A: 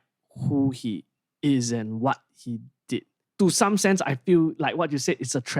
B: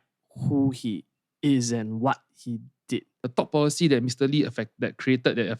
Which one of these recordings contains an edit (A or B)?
B